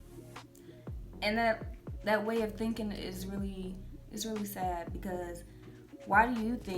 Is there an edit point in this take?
yes; 1 cut; at 1.2 s

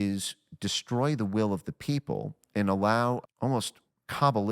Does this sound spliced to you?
yes; 1 cut; at 3.2 s

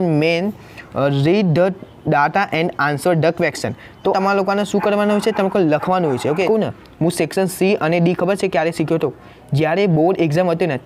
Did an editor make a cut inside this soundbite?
yes; 2 cuts; at 4.2 s, 6.5 s

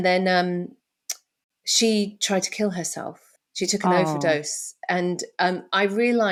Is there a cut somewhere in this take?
no; 0 cuts

